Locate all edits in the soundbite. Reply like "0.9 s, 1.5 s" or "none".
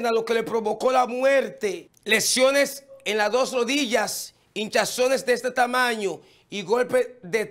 1.9 s, 3.0 s